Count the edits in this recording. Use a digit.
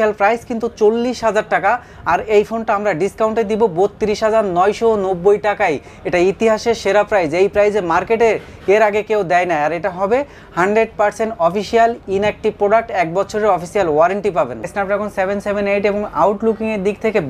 1